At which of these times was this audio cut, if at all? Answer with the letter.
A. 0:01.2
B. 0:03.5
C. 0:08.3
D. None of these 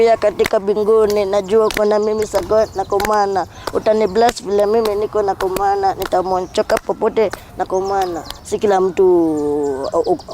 C